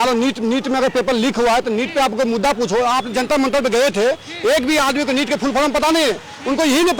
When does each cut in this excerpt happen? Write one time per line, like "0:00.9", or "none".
none